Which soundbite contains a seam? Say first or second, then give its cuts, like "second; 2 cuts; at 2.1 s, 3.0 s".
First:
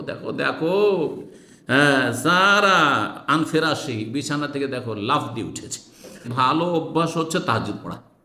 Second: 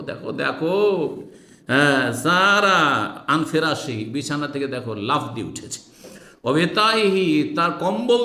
first; 1 cut; at 6.3 s